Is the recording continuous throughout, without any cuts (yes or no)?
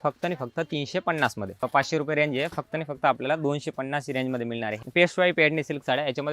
no